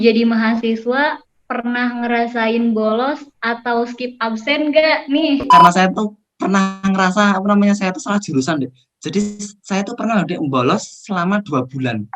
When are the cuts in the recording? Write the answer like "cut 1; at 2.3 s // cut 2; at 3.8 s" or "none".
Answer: cut 1; at 5.5 s